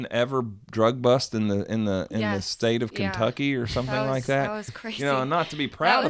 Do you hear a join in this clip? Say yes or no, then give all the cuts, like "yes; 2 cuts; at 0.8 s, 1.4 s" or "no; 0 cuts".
no; 0 cuts